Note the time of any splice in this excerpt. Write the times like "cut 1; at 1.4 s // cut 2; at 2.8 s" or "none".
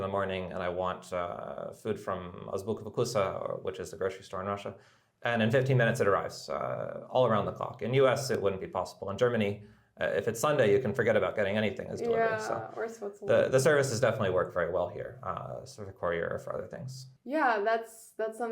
none

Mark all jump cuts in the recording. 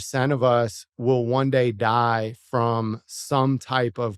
none

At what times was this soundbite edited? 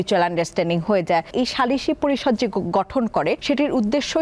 cut 1; at 1.3 s // cut 2; at 3.4 s

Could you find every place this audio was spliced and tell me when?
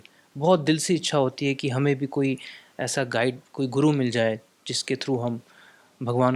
none

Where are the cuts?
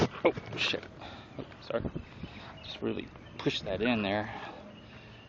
cut 1; at 3.2 s

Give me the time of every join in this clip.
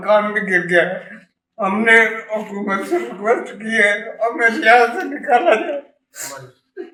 none

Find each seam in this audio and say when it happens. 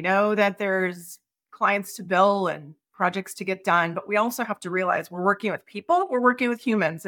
none

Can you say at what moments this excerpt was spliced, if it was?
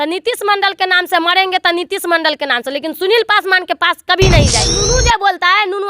cut 1; at 4.7 s

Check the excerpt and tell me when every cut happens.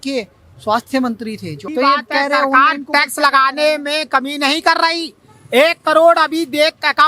cut 1; at 1.7 s

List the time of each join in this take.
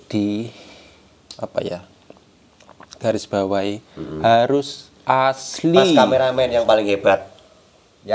cut 1; at 6.0 s

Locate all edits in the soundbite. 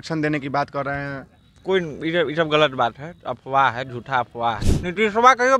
cut 1; at 4.6 s

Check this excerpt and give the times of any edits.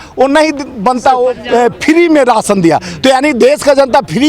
cut 1; at 1.4 s

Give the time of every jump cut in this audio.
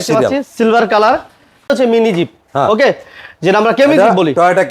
cut 1; at 1.7 s

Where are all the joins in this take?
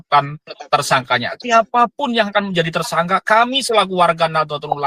none

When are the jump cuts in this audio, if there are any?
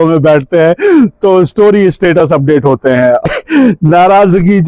cut 1; at 3.2 s

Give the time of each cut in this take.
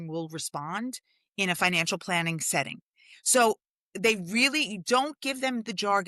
none

